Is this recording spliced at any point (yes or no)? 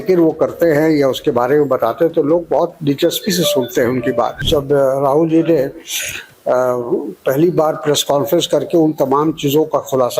yes